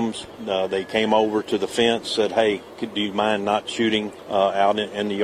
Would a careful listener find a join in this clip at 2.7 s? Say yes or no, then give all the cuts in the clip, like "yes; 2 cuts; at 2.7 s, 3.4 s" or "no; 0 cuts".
no; 1 cut; at 4.2 s